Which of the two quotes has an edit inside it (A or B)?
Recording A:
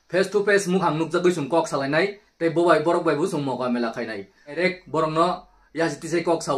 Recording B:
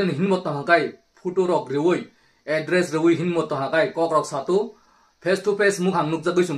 A